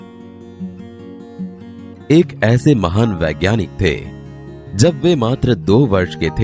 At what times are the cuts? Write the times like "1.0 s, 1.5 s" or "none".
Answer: 2.1 s